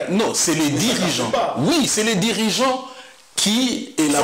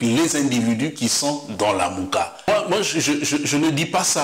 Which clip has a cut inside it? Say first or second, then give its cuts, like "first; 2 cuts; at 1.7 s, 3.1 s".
second; 1 cut; at 2.5 s